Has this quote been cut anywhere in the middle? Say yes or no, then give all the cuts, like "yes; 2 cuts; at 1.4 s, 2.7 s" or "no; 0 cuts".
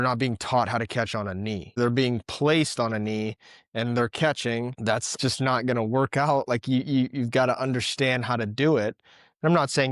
yes; 2 cuts; at 1.8 s, 5.0 s